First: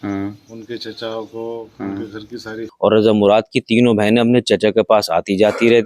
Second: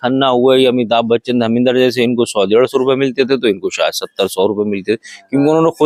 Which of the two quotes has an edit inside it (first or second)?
first